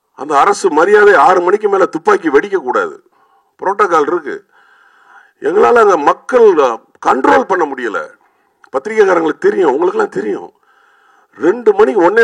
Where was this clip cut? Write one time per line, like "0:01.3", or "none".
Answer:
none